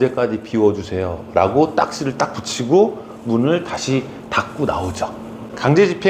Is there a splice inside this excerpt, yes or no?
no